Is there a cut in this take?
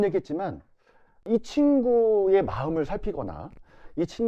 yes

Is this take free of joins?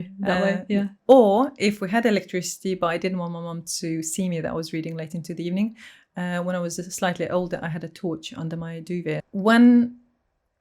no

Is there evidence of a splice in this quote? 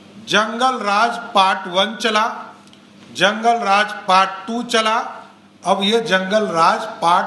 no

